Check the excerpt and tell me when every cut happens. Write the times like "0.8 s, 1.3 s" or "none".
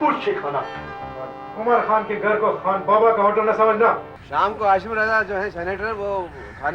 4.1 s